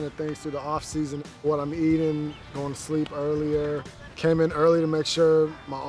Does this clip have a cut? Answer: yes; 2 cuts; at 1.3 s, 4.0 s

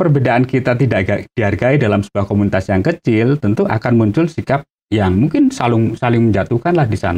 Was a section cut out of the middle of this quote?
no; 0 cuts

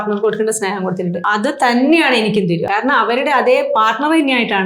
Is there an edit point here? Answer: yes; 2 cuts; at 1.2 s, 2.6 s

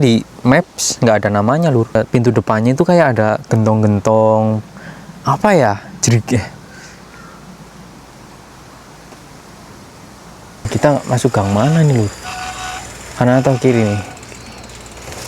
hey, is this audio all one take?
no; 2 cuts; at 1.9 s, 10.7 s

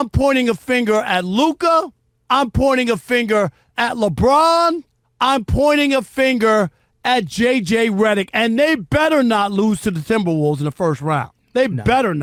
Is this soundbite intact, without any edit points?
yes; 0 cuts

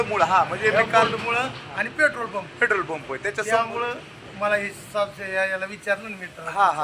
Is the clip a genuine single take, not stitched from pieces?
yes; 0 cuts

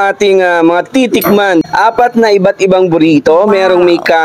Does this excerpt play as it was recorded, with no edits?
no; 1 cut; at 1.6 s

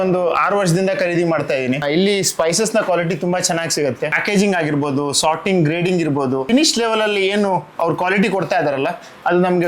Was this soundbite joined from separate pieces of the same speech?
no; 0 cuts

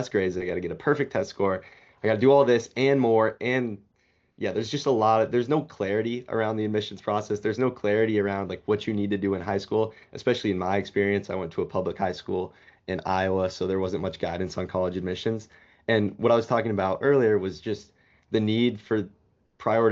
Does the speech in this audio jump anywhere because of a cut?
no; 0 cuts

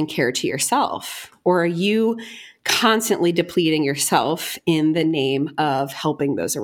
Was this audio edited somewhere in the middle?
no; 0 cuts

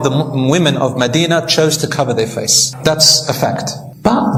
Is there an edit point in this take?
no; 0 cuts

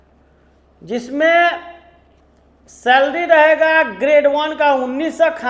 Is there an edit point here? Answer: no; 0 cuts

